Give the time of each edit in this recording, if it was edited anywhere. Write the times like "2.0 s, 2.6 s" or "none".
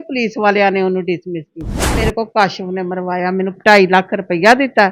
2.1 s